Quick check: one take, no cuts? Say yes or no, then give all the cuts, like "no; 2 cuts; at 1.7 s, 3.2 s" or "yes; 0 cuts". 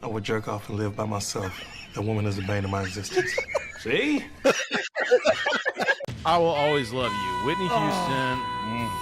no; 2 cuts; at 4.4 s, 6.0 s